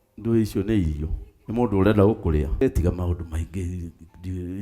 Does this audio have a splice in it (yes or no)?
yes